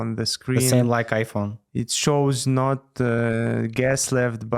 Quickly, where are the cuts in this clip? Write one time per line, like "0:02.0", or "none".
none